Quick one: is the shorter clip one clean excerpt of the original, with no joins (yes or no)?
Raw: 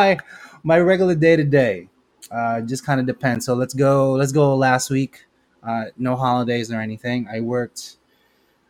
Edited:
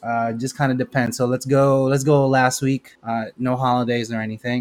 no